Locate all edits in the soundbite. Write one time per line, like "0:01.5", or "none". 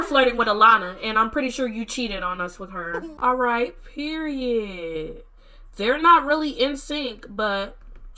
0:03.1